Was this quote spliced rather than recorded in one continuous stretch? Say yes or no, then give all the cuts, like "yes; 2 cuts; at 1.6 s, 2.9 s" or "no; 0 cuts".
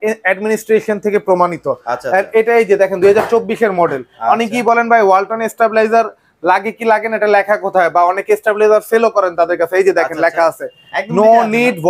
no; 0 cuts